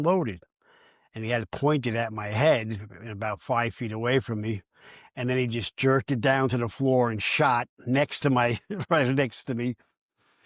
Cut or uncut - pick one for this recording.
uncut